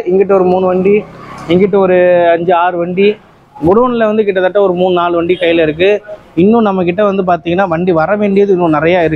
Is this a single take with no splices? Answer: yes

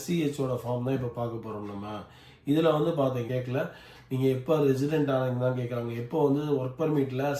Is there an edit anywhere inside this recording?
yes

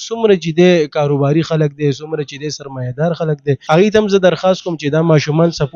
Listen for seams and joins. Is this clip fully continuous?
no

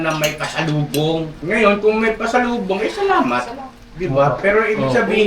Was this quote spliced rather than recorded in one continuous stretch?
yes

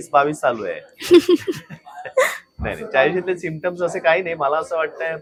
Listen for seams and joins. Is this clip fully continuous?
yes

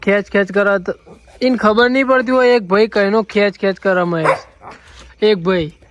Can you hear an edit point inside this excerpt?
no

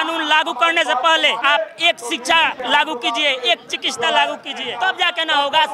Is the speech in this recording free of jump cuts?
no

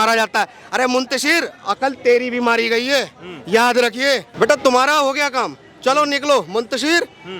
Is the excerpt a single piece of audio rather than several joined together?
no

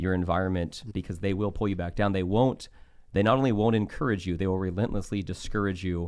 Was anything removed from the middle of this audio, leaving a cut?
yes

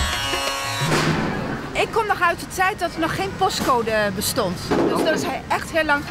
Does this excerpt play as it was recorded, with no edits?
yes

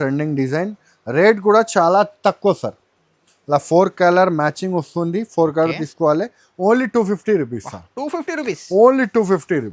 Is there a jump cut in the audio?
no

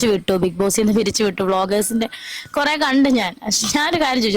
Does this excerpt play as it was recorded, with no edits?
no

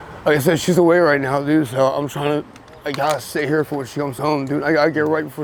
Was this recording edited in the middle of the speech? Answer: no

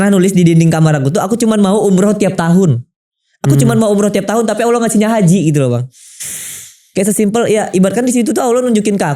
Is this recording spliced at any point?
no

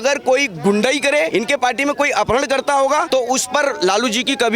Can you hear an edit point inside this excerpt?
yes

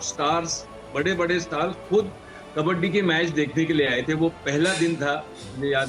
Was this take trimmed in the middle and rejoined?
no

